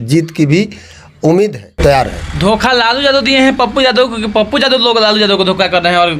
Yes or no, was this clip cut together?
yes